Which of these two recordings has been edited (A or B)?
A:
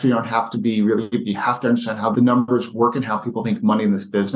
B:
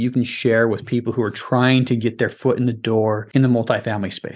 B